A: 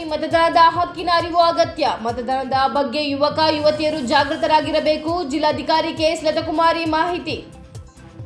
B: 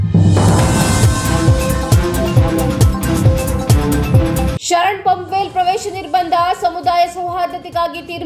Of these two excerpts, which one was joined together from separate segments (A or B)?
B